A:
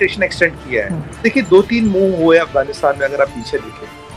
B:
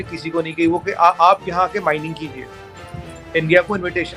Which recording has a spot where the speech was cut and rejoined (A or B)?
A